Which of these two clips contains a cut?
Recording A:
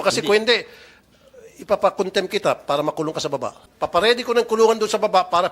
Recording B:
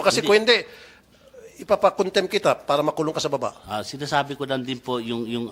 A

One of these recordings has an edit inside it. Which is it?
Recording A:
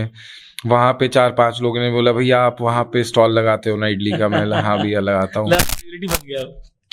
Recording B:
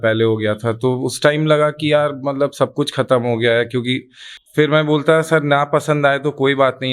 B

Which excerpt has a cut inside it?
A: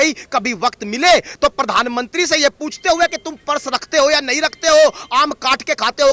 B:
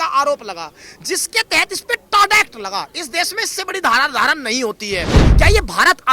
B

